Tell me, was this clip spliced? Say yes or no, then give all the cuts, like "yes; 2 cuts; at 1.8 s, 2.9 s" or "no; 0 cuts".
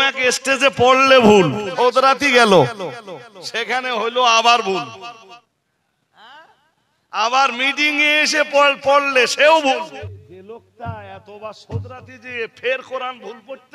yes; 3 cuts; at 1.7 s, 5.4 s, 10.0 s